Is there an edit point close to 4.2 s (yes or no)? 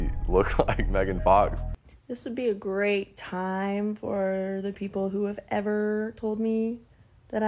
no